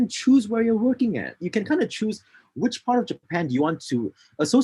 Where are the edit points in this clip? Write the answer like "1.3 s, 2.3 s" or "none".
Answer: 1.4 s